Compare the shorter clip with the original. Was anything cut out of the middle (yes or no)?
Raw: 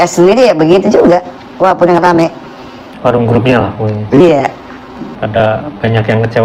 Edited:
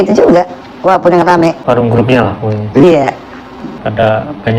yes